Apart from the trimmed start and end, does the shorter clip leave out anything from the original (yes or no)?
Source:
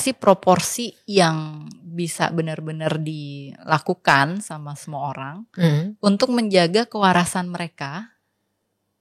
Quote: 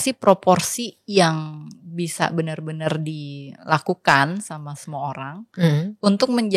no